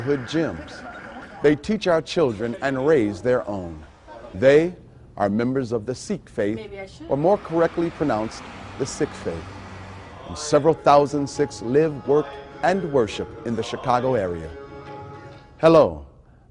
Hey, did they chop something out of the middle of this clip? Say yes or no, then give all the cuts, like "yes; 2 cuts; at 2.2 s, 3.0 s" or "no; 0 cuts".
yes; 1 cut; at 9.6 s